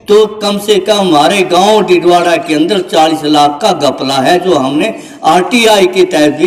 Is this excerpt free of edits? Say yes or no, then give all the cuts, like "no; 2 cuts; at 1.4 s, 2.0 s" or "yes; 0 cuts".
yes; 0 cuts